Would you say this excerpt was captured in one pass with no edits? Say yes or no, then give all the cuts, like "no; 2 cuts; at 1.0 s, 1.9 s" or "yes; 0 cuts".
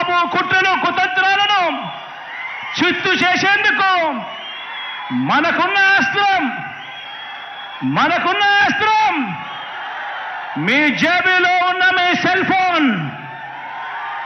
yes; 0 cuts